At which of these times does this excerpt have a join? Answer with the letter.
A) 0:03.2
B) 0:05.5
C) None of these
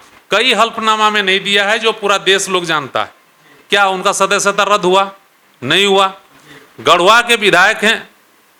C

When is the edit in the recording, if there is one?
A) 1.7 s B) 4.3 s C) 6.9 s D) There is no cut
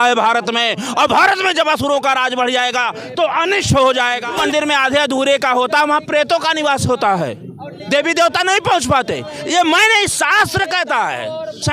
B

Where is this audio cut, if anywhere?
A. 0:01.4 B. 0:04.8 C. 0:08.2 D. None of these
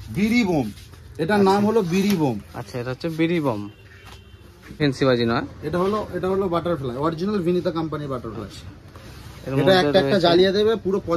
B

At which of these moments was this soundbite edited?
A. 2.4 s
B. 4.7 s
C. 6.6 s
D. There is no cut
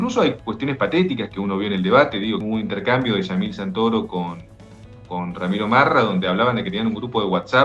A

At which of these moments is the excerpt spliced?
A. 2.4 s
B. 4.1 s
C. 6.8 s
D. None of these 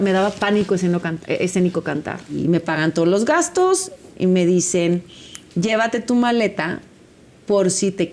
A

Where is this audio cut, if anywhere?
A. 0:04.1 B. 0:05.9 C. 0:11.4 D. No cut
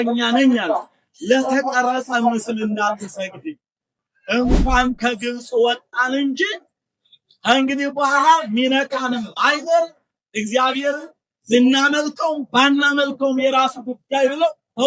A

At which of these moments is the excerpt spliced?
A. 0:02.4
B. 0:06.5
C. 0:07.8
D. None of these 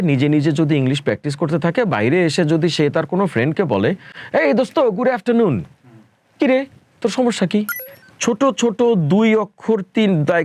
C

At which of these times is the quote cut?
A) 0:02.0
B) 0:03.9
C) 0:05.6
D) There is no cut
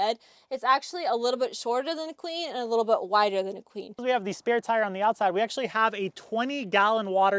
B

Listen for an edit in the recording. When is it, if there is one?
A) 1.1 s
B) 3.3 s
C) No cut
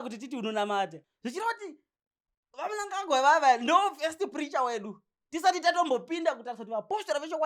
A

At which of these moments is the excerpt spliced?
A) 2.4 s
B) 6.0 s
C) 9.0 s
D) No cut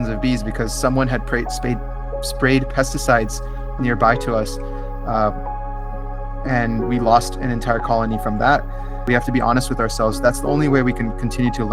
C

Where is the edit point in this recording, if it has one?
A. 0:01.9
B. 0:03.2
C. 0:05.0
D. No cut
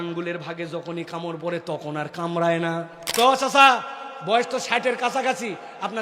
B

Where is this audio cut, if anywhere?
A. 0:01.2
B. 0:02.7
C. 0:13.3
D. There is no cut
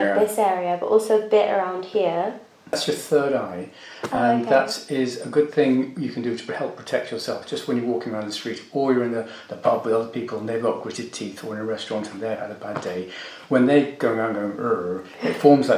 B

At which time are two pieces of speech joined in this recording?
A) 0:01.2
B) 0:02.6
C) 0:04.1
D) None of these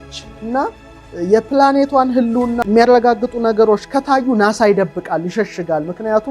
B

